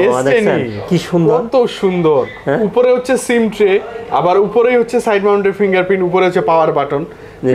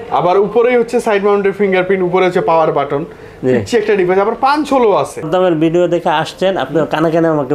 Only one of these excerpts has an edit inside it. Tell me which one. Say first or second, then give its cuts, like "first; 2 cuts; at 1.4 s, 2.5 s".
second; 1 cut; at 5.3 s